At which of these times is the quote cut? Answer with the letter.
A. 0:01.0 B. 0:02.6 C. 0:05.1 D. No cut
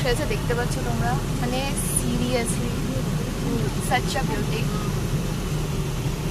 D